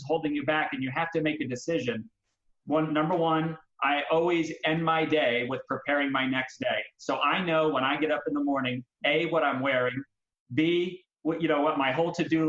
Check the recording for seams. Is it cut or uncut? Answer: uncut